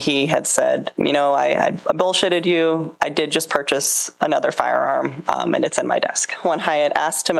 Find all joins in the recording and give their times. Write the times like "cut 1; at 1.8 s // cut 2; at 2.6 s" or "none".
cut 1; at 0.9 s // cut 2; at 2.9 s // cut 3; at 6.4 s